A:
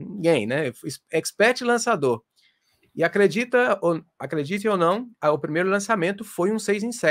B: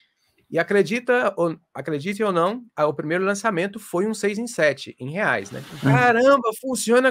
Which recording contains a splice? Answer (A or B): B